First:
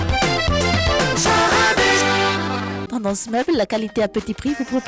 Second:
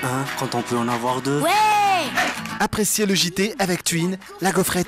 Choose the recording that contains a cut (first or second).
first